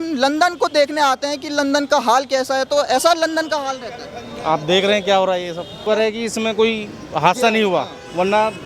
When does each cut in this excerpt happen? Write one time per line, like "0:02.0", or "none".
0:05.8